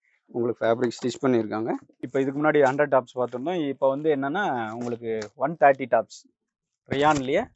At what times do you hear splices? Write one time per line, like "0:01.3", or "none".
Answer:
0:02.1

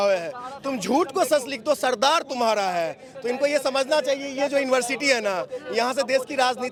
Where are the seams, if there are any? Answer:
none

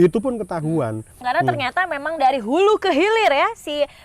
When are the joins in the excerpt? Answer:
0:01.2

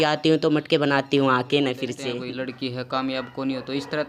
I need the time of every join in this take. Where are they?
0:02.0

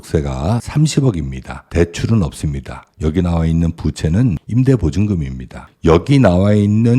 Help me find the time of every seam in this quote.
0:05.7

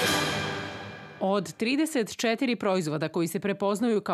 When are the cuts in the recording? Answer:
0:00.9

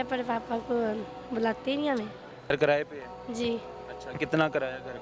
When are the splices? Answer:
0:02.5

